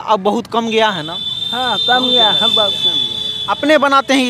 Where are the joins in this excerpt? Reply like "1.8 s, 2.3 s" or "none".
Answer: none